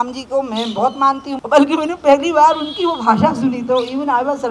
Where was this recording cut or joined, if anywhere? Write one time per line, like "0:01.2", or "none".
0:01.3

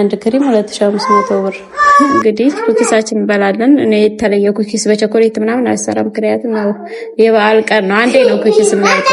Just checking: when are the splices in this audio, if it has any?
0:02.1

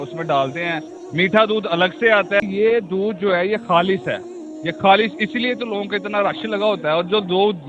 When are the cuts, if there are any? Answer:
0:02.4

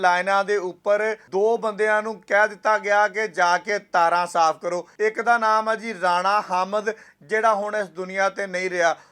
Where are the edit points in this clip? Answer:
0:01.2
0:04.9

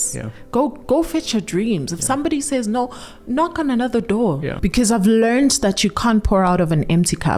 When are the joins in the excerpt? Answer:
0:04.6

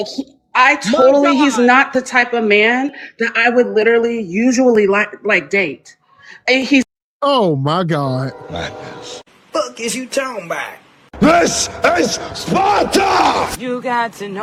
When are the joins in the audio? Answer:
none

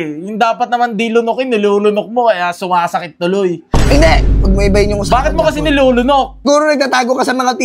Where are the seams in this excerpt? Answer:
0:06.4

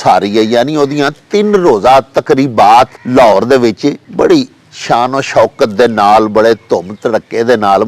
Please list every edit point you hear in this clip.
0:03.0
0:04.0

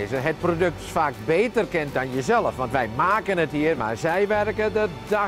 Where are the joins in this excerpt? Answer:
0:03.8

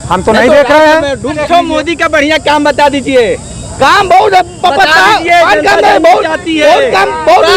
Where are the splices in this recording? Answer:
0:01.4

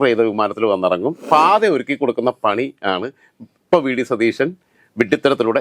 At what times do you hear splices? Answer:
0:01.2

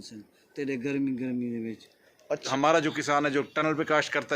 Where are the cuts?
0:02.4

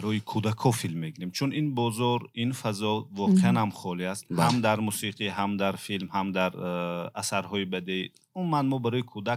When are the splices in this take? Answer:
none

